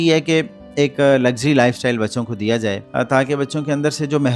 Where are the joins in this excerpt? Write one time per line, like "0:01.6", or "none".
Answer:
0:02.8